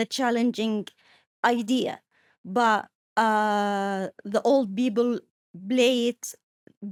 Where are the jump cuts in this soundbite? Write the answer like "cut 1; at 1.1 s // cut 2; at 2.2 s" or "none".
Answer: none